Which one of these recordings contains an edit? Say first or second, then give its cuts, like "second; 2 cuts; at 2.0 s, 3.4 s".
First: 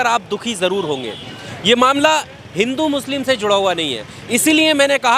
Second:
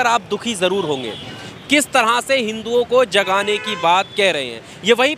second; 1 cut; at 1.5 s